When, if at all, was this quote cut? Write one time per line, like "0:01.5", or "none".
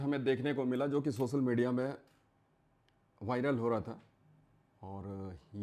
none